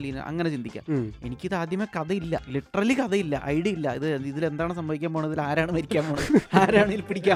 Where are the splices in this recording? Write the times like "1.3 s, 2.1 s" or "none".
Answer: none